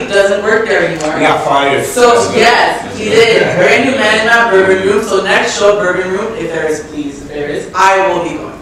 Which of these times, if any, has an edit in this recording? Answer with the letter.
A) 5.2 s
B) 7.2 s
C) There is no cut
C